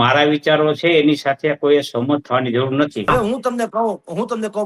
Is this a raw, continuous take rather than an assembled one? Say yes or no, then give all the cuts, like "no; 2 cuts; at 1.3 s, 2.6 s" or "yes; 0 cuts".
no; 1 cut; at 3.1 s